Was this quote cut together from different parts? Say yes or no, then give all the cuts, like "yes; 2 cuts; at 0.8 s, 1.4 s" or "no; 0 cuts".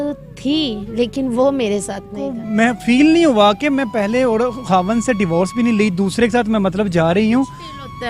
yes; 1 cut; at 2.4 s